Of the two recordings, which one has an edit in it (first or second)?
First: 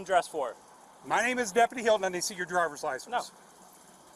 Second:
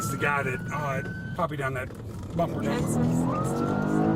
second